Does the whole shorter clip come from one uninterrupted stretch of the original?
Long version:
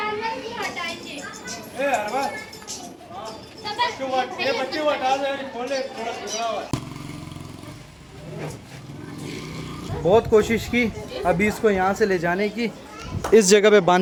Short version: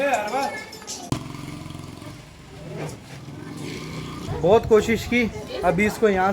no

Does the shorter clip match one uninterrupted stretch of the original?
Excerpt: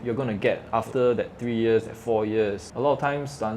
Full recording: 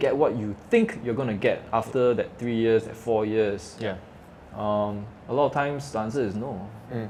no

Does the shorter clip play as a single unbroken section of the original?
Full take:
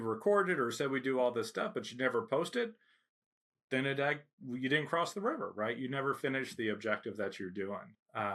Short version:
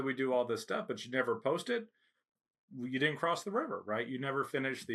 no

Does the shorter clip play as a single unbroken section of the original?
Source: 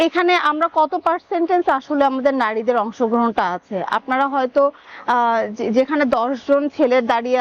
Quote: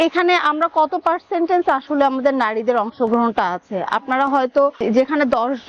no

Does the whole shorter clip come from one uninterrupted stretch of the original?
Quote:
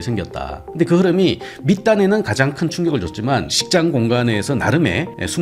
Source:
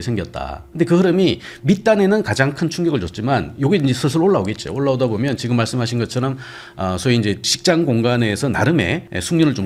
no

